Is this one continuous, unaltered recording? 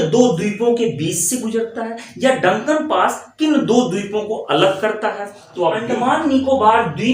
no; 1 cut; at 5.8 s

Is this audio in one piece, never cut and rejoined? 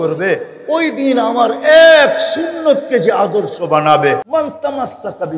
no; 1 cut; at 4.2 s

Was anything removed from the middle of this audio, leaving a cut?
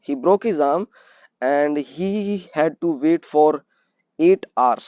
no; 0 cuts

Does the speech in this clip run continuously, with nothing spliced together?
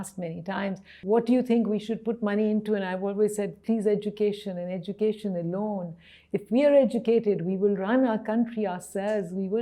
no; 1 cut; at 1.0 s

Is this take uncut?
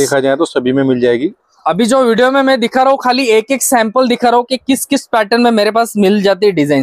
yes; 0 cuts

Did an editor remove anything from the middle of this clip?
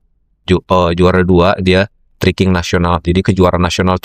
no; 0 cuts

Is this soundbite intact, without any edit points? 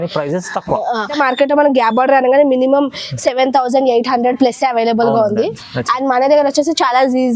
no; 1 cut; at 1.2 s

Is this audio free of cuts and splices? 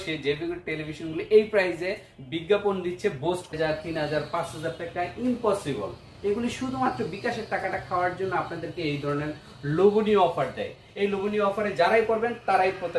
no; 1 cut; at 3.5 s

